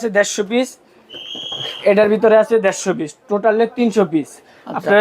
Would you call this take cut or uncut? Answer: uncut